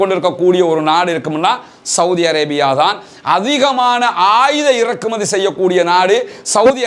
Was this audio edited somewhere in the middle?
no; 0 cuts

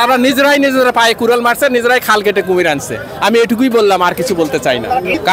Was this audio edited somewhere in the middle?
no; 0 cuts

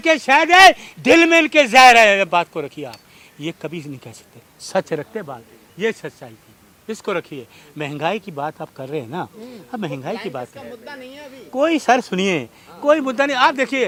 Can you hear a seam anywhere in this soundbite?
no; 0 cuts

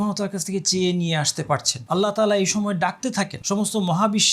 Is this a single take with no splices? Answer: no; 2 cuts; at 1.7 s, 3.4 s

